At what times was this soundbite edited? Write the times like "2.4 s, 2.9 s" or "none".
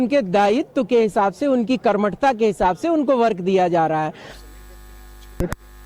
4.3 s